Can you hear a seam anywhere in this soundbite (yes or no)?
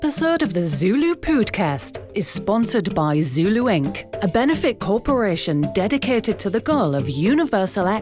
no